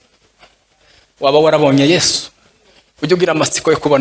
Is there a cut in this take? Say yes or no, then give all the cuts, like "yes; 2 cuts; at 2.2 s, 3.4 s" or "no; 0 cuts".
no; 0 cuts